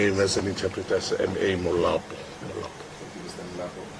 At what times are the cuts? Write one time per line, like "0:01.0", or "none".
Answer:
none